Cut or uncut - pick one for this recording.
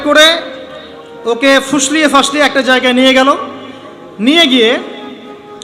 uncut